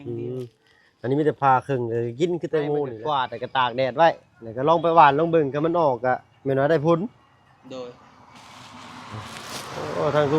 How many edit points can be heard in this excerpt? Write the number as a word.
one